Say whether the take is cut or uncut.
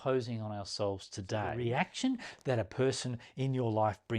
cut